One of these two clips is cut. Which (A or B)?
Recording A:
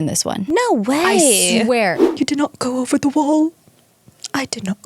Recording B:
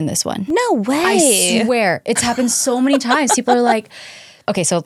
A